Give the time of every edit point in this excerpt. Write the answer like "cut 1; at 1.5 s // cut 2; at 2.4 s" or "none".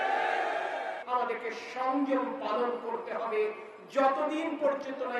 cut 1; at 1.0 s